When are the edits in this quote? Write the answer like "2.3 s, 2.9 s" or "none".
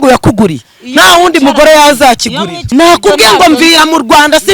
2.5 s